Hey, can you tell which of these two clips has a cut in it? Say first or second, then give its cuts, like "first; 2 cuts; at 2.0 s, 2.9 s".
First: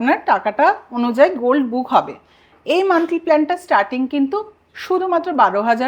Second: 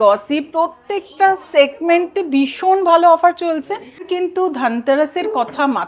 second; 1 cut; at 4.1 s